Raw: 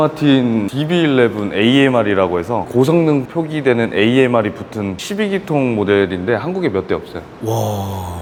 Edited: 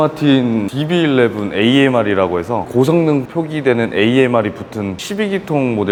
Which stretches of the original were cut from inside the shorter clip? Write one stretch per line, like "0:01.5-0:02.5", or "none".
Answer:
none